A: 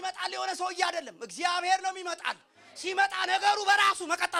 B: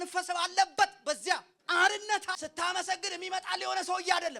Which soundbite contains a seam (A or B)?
B